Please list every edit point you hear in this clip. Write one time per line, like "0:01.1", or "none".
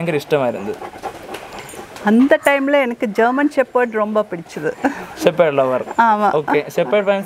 none